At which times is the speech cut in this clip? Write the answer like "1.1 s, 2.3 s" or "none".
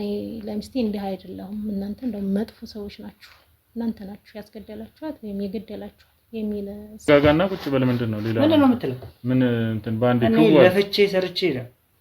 7.1 s

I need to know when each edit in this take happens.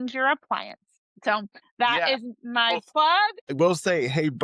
1.4 s, 3.5 s

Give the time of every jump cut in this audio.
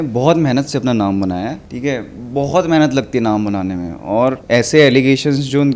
1.6 s, 4.4 s

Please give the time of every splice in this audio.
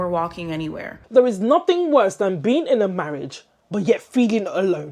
1.0 s

